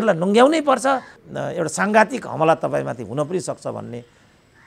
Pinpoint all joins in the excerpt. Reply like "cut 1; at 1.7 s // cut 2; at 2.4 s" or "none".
cut 1; at 1.1 s